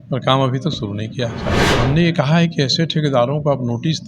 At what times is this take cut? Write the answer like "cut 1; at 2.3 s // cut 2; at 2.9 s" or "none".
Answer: cut 1; at 1.6 s